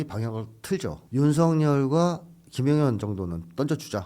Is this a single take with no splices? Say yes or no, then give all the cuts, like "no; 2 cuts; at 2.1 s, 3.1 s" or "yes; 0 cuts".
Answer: no; 1 cut; at 1.0 s